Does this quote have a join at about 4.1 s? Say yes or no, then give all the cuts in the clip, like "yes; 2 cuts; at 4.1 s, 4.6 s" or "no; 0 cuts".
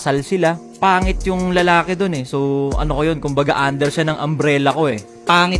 no; 0 cuts